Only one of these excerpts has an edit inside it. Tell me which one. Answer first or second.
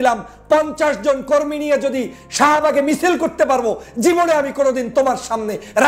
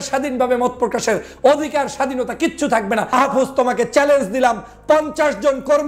second